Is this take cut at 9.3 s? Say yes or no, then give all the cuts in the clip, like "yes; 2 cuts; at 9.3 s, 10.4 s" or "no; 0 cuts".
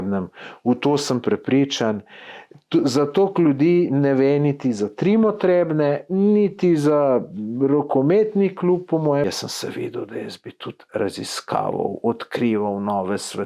yes; 1 cut; at 9.3 s